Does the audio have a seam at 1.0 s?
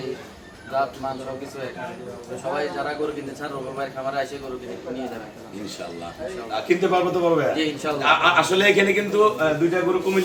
no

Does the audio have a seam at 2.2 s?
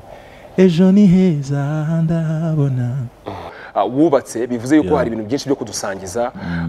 no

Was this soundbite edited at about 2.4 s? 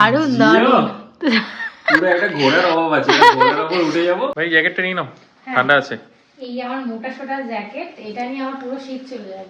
no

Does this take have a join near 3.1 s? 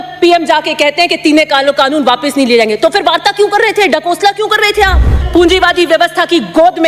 no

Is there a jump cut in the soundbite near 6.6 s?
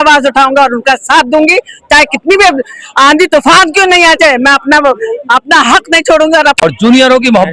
yes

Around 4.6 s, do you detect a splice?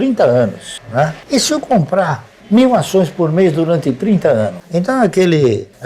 yes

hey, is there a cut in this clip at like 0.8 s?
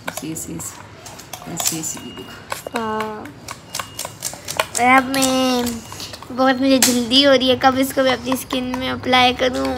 no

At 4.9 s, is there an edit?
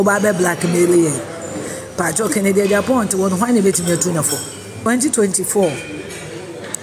yes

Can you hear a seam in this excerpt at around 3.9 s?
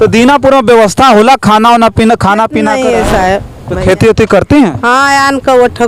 no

